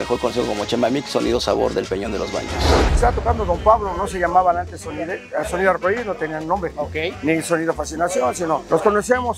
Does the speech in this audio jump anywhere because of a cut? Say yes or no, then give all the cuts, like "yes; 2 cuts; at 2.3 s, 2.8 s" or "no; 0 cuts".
yes; 1 cut; at 2.9 s